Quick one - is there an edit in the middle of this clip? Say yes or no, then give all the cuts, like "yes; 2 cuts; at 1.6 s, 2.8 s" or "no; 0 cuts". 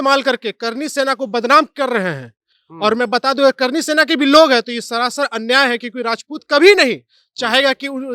no; 0 cuts